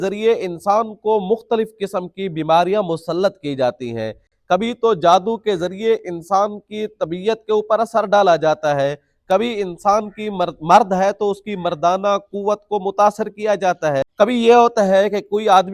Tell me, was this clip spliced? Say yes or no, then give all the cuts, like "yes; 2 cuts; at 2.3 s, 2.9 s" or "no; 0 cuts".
no; 0 cuts